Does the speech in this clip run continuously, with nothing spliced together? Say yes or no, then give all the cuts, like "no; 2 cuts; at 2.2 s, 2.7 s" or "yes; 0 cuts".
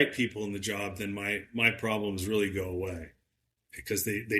yes; 0 cuts